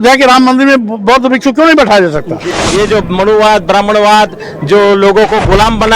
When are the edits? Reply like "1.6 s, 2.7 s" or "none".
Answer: 2.5 s